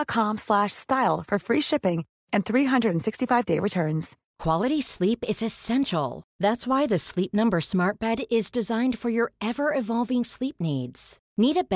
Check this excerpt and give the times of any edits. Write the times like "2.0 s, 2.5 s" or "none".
4.2 s